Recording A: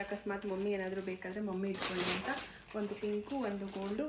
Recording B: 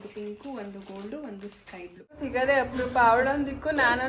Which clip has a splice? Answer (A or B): B